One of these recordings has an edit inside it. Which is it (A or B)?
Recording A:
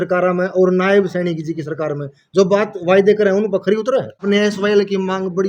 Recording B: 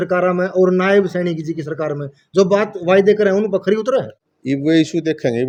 A